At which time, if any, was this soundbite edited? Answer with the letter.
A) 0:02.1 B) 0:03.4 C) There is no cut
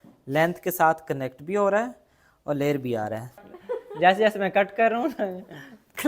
B